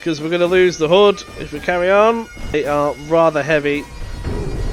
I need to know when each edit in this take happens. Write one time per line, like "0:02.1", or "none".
0:02.5